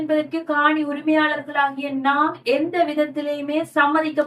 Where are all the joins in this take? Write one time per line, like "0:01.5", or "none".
none